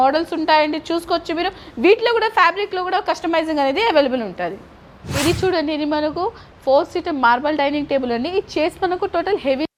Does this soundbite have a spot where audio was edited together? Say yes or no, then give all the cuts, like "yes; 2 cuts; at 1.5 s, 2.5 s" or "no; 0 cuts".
no; 0 cuts